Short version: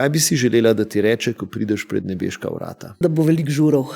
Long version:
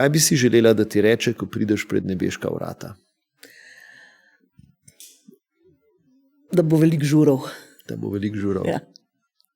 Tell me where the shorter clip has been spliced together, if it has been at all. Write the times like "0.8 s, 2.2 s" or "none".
2.9 s

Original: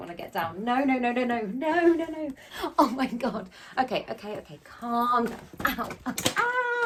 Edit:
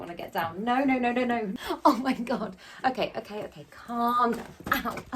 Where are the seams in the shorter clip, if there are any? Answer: 1.5 s

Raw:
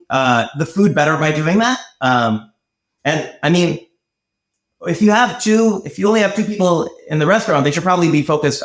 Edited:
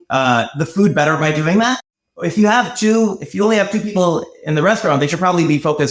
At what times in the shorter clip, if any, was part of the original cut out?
1.9 s

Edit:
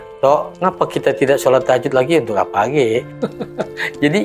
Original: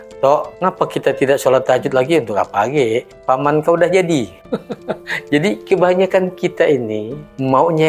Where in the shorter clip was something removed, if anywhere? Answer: 3.1 s

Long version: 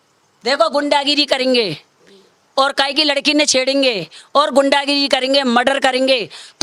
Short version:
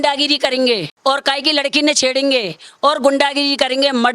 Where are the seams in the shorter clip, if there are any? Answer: 0.9 s

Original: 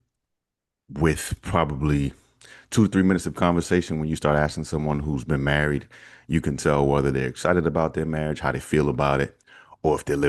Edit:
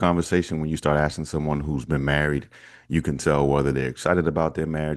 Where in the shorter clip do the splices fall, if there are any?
none

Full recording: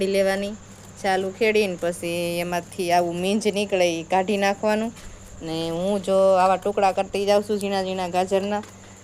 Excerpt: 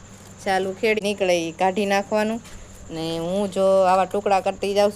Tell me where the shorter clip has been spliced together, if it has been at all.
1.0 s

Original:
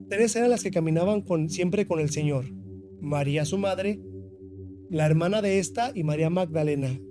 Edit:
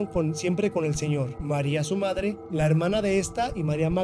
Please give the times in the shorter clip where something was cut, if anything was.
1.4 s, 2.4 s

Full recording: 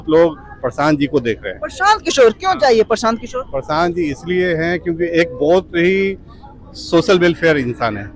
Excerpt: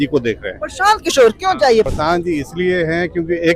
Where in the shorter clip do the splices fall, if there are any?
1.9 s

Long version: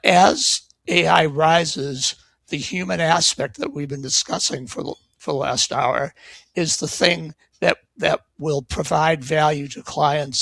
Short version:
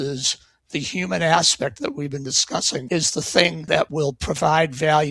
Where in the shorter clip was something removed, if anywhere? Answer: 2.8 s, 3.8 s

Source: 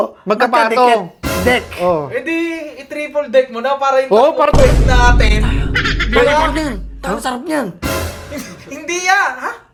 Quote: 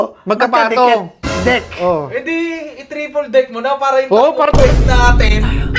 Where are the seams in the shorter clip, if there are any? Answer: none

